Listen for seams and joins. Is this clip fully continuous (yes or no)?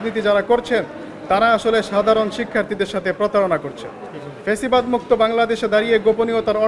yes